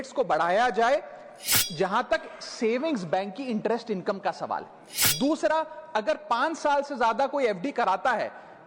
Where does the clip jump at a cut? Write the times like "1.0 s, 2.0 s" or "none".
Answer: none